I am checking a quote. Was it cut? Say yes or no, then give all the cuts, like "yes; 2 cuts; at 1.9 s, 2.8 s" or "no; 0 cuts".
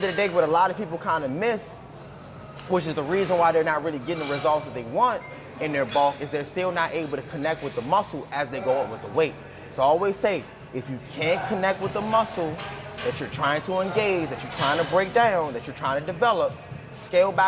no; 0 cuts